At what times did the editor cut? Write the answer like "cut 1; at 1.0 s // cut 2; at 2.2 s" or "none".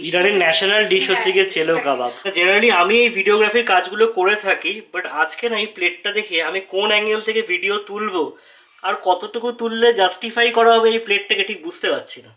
cut 1; at 2.2 s

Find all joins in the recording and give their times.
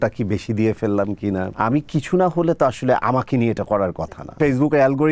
cut 1; at 1.5 s // cut 2; at 4.4 s

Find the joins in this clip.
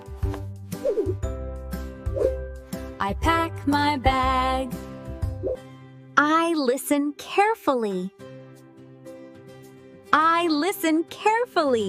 none

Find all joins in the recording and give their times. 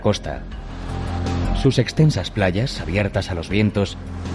cut 1; at 1.4 s

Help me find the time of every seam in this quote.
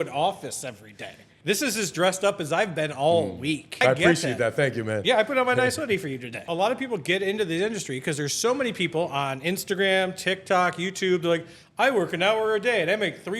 cut 1; at 1.3 s // cut 2; at 3.7 s // cut 3; at 6.5 s

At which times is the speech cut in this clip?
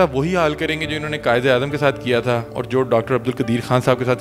cut 1; at 2.5 s

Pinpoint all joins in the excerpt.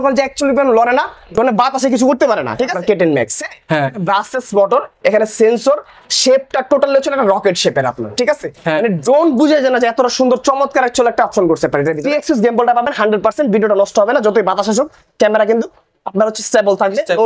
cut 1; at 2.8 s // cut 2; at 12.0 s

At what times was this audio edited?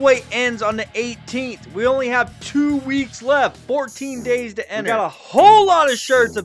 cut 1; at 4.8 s

